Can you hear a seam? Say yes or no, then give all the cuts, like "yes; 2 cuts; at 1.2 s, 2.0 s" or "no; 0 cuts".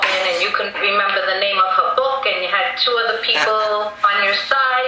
yes; 1 cut; at 2.8 s